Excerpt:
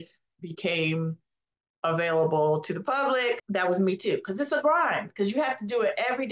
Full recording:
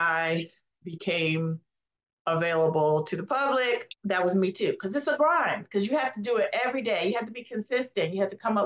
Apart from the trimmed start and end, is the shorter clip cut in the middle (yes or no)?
yes